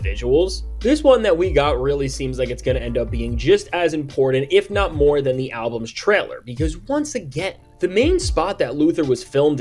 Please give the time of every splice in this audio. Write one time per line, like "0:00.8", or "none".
none